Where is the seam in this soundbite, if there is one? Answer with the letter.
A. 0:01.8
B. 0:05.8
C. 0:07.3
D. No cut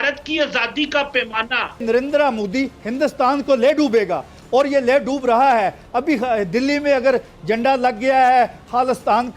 A